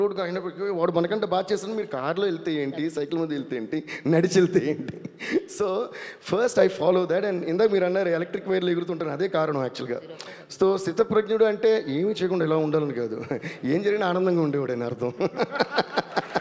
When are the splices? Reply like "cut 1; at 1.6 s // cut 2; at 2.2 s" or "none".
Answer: none